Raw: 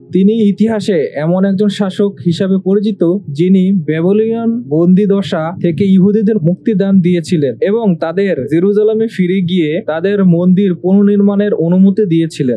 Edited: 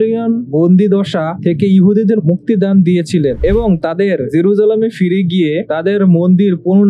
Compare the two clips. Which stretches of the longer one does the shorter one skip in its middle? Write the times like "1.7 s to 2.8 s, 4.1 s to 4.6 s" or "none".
none

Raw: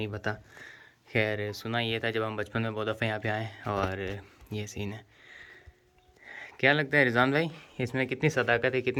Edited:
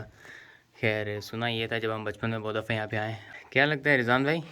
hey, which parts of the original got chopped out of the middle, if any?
3.5 s to 6.3 s

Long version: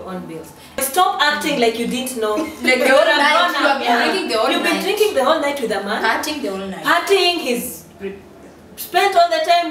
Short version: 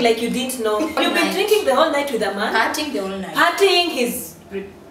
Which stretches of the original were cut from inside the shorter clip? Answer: 2.5 s to 4.5 s

